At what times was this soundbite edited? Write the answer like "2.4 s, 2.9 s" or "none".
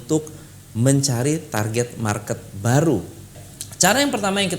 3.6 s